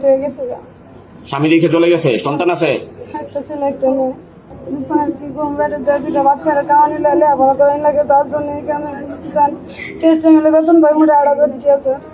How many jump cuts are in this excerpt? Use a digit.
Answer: 1